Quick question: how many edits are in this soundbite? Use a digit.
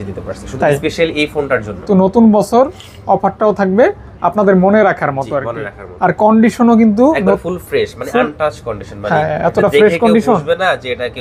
1